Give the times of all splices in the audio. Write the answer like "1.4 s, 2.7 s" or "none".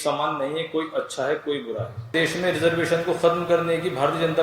2.1 s